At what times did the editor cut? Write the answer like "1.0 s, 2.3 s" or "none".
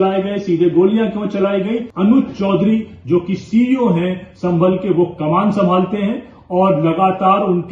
1.9 s